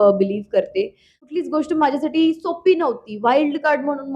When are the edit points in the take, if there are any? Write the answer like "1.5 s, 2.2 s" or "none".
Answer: 1.1 s